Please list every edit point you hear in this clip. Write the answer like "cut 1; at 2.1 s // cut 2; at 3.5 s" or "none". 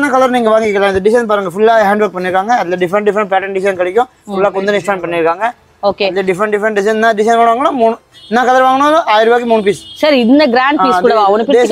none